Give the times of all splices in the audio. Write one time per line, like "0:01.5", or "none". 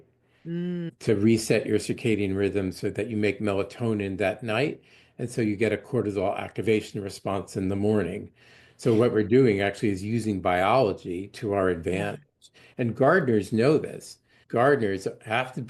none